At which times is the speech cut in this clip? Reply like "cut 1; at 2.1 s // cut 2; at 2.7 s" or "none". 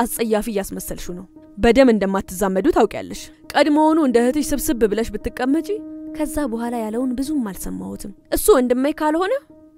none